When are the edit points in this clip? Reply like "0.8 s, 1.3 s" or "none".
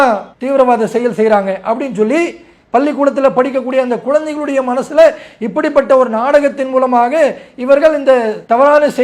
none